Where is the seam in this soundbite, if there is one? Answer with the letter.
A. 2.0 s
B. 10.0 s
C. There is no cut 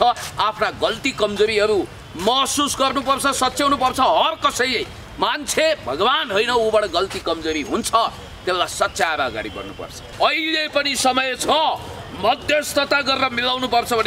B